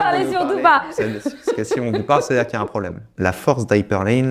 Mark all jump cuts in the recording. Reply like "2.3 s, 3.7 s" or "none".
3.1 s